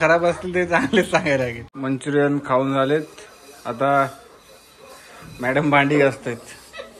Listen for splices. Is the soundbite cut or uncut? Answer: cut